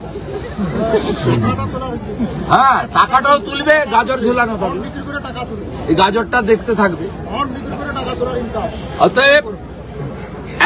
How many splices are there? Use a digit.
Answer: 0